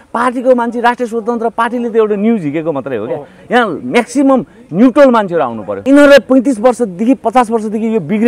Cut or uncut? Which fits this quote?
cut